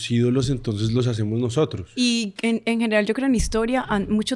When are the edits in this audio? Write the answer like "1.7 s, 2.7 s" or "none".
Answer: 1.8 s